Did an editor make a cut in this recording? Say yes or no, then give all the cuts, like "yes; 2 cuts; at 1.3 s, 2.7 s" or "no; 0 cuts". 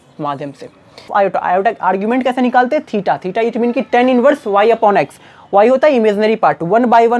yes; 1 cut; at 1.1 s